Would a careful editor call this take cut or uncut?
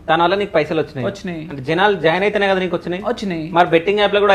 uncut